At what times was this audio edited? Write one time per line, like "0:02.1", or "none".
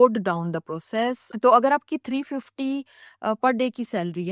0:01.3